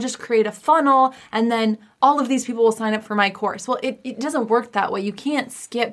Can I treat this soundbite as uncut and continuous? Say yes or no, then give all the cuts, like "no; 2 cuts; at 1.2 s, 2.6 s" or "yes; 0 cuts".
no; 1 cut; at 1.9 s